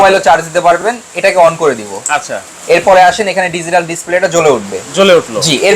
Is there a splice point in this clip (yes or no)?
no